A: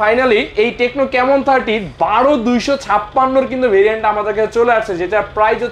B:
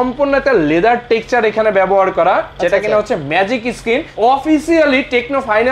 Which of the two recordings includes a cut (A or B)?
B